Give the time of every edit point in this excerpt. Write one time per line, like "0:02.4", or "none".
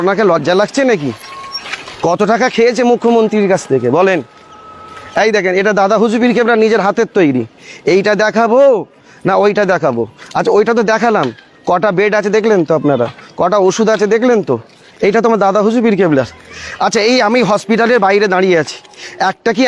none